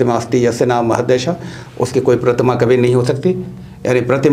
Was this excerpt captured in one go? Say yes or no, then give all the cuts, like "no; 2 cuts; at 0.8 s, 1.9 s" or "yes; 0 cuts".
yes; 0 cuts